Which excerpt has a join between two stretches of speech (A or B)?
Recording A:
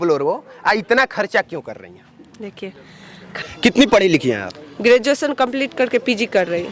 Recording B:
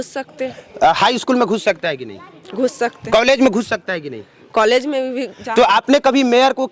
A